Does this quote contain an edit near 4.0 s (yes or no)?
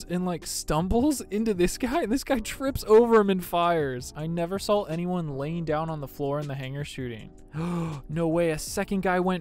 yes